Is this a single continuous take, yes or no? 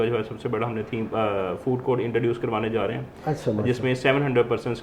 yes